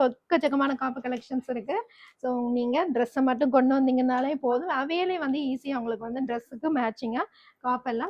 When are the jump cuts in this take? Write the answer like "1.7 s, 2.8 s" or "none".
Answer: none